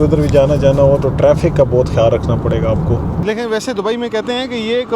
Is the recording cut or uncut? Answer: cut